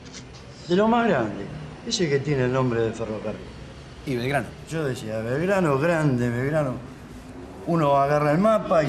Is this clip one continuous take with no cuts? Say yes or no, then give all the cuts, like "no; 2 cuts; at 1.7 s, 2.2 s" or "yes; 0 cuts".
no; 1 cut; at 3.6 s